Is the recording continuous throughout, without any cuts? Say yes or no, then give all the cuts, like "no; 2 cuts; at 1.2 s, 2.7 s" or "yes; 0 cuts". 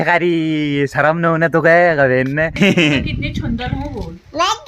no; 1 cut; at 2.5 s